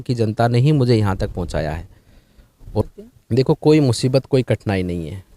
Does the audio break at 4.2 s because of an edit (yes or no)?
no